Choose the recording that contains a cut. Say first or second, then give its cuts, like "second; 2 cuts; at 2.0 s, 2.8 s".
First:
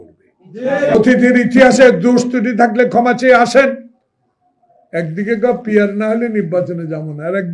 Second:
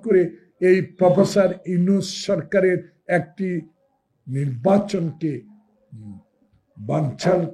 first; 1 cut; at 1.0 s